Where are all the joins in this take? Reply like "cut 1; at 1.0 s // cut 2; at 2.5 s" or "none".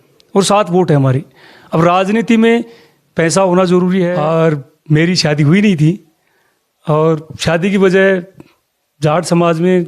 cut 1; at 4.1 s